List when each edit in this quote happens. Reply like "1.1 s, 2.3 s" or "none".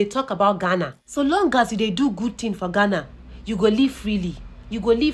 1.0 s